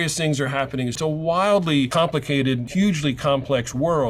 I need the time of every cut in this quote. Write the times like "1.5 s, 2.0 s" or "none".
1.0 s, 2.3 s